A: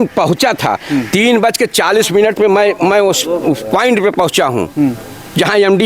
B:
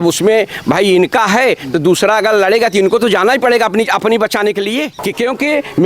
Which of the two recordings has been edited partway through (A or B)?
B